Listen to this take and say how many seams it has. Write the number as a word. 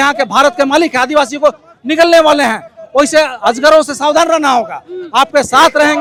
zero